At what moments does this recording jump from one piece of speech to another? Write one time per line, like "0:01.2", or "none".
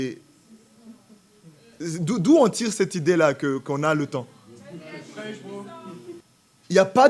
0:06.2